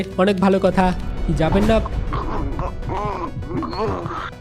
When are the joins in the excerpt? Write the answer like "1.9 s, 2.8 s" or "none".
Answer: 1.0 s